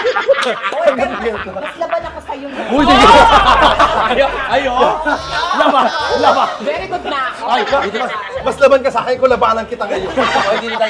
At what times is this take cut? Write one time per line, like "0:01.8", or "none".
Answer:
none

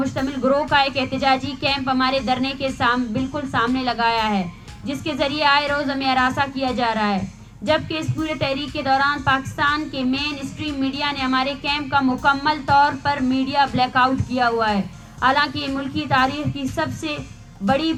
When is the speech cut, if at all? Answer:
none

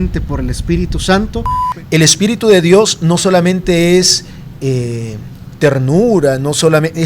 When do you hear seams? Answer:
0:01.6

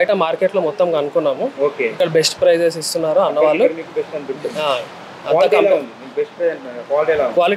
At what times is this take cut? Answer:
none

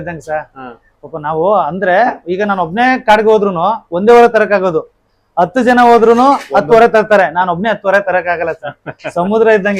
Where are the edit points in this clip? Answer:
none

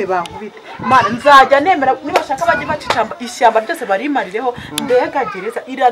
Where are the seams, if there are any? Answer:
none

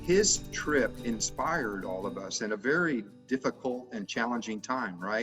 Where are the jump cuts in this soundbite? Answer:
0:01.0

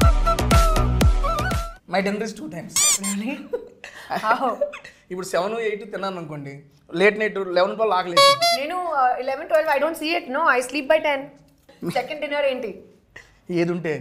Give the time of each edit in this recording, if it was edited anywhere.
0:01.7
0:11.7

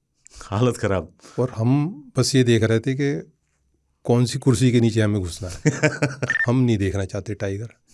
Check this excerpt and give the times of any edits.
0:06.3

